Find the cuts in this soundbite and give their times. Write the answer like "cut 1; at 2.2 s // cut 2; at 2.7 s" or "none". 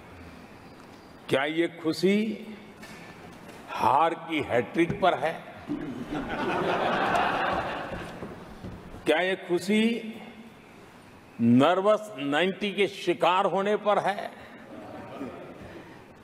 none